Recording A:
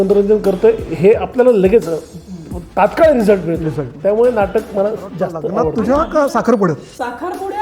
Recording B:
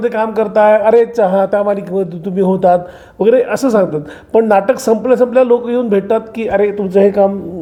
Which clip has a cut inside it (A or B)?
A